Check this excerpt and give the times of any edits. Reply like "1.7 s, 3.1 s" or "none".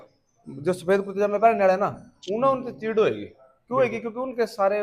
none